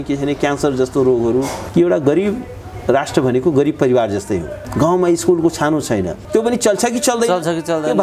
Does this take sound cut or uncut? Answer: cut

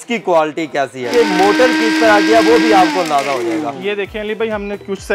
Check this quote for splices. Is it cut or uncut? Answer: cut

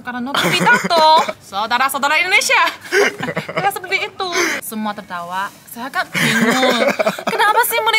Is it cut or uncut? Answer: cut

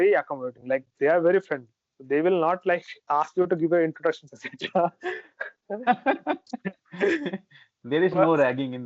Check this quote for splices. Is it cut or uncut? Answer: uncut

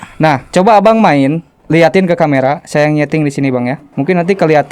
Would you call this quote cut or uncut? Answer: cut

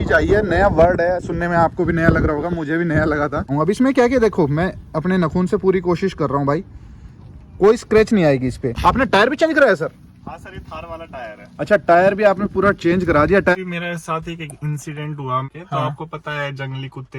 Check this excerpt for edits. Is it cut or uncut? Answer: cut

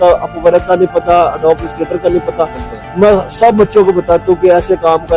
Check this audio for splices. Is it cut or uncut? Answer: uncut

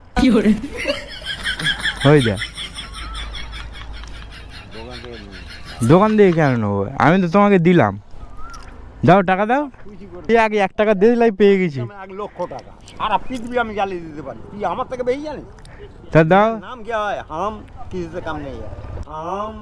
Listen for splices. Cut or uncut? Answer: cut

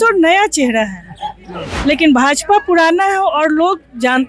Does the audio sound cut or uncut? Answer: uncut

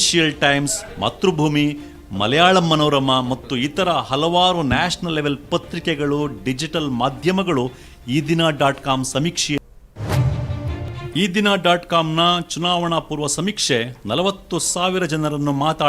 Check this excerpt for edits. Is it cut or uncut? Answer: cut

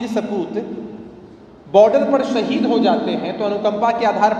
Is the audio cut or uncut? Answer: uncut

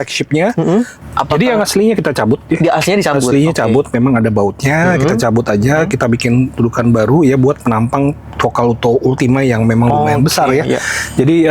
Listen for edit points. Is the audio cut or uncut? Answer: cut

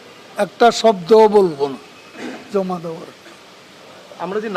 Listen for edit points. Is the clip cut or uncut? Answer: uncut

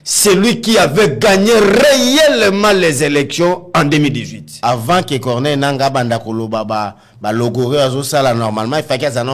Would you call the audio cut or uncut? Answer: cut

